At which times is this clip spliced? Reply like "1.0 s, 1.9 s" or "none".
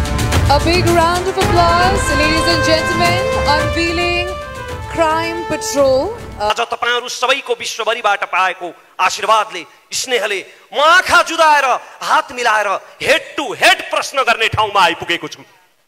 6.5 s